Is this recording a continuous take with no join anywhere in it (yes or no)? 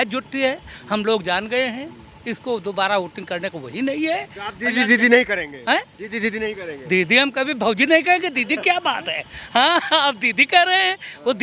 yes